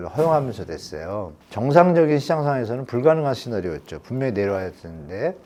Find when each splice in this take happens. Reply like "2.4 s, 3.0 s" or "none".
none